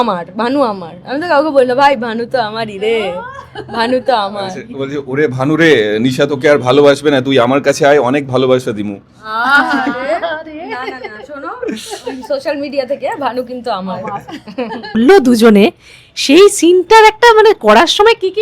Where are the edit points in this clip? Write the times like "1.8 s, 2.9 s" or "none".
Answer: 15.0 s